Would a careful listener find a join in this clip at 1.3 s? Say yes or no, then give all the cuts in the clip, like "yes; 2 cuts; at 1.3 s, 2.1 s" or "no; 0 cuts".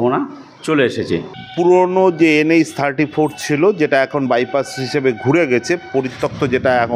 yes; 1 cut; at 1.3 s